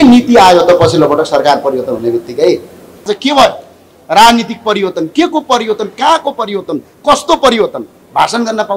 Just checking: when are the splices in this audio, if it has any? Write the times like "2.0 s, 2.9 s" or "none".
3.1 s